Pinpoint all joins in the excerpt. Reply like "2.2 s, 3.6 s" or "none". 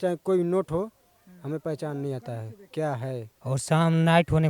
3.3 s